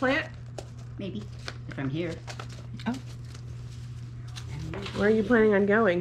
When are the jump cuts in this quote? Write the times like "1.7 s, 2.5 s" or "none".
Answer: none

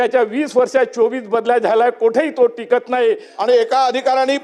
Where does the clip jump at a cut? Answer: 3.3 s

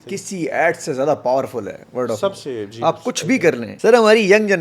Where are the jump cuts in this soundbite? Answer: 3.7 s

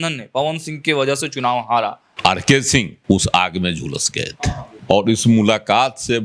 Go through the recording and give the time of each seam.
2.0 s, 2.9 s, 4.7 s

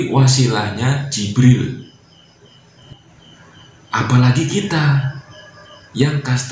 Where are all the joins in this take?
2.8 s

